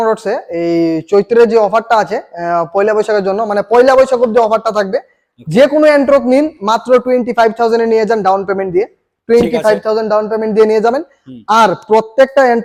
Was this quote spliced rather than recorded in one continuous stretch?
no; 0 cuts

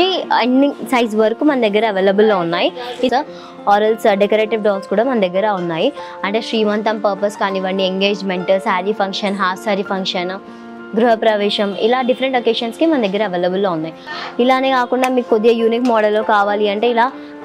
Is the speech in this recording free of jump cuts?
no; 2 cuts; at 3.1 s, 14.1 s

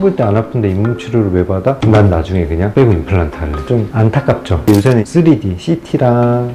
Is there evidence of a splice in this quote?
yes; 2 cuts; at 3.6 s, 4.7 s

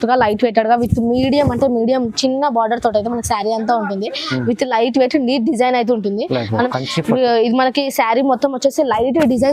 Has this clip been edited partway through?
yes; 1 cut; at 6.6 s

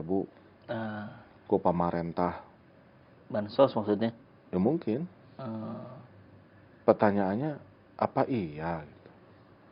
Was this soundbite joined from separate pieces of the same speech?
no; 0 cuts

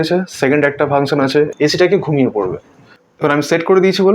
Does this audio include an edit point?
yes; 2 cuts; at 1.5 s, 2.7 s

